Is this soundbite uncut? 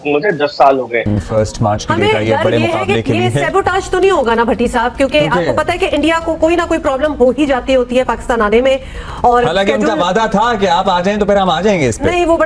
no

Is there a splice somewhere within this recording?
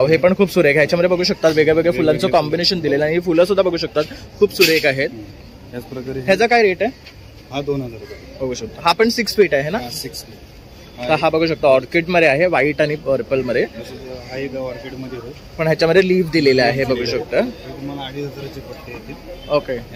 no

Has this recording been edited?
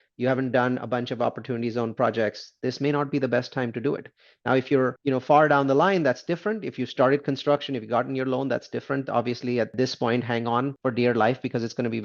yes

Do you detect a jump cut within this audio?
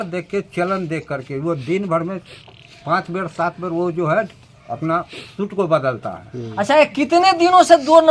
no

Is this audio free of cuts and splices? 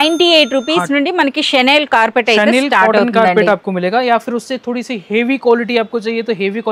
yes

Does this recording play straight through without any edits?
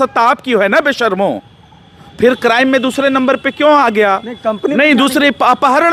yes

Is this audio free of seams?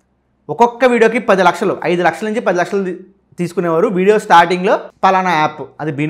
yes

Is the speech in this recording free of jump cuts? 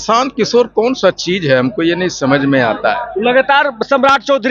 yes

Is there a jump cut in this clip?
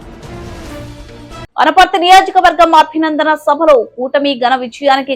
yes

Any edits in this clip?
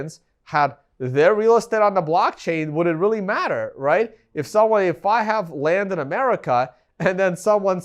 no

